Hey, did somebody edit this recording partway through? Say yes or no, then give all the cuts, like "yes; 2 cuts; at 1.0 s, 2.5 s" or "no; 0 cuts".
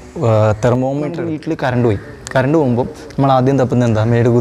yes; 1 cut; at 1.3 s